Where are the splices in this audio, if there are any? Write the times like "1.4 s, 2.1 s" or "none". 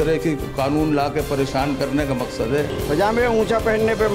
2.8 s